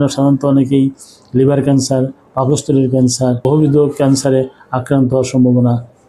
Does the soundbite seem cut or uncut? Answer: cut